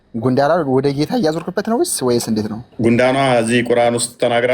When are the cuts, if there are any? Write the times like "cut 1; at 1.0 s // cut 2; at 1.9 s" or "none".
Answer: cut 1; at 2.6 s

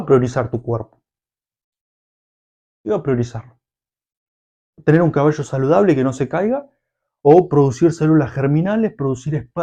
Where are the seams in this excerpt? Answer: none

